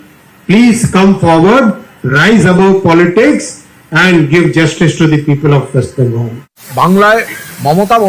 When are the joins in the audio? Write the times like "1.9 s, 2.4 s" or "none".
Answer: 6.3 s